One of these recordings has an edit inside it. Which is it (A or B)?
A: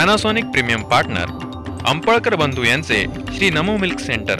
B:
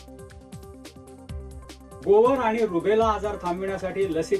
B